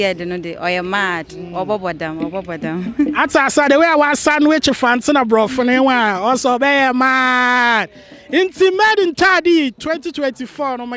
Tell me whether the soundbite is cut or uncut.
uncut